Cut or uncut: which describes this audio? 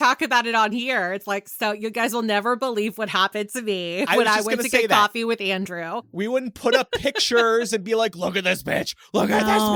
uncut